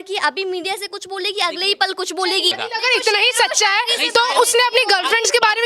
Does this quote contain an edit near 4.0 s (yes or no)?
no